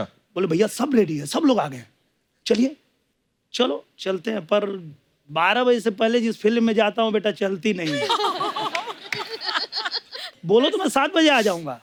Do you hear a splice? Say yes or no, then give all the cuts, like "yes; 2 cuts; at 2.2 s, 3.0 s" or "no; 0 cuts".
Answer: no; 0 cuts